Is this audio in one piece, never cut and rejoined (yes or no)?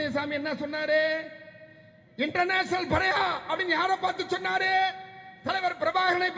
yes